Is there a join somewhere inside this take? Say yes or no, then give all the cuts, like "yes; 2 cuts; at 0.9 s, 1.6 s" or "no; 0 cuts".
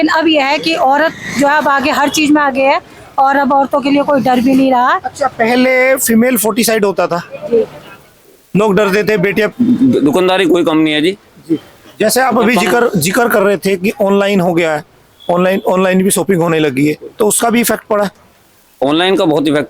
yes; 1 cut; at 9.5 s